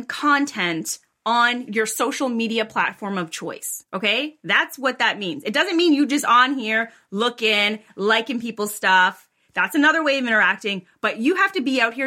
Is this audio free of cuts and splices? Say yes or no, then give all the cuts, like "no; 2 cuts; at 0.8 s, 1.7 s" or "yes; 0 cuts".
no; 2 cuts; at 1.6 s, 3.7 s